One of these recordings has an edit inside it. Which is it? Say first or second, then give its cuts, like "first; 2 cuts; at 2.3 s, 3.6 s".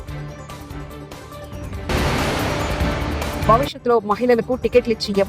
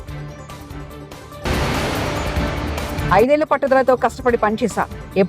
first; 1 cut; at 1.3 s